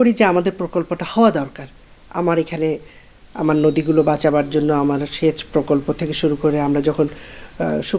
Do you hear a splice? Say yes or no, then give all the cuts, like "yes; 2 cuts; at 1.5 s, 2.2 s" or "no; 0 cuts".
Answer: no; 0 cuts